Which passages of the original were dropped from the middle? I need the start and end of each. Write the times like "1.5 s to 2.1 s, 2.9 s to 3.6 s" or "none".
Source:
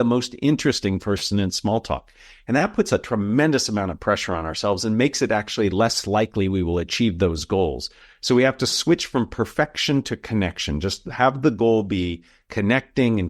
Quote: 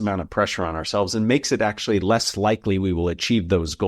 none